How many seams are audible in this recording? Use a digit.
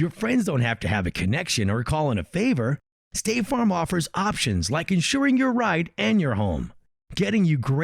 0